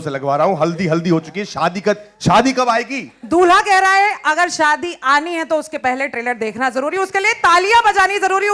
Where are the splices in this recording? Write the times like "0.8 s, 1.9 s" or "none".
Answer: none